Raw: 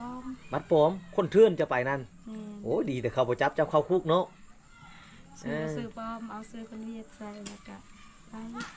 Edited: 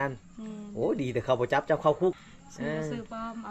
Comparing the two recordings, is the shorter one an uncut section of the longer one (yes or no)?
no